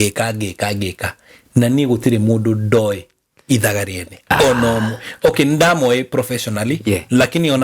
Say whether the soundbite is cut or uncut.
uncut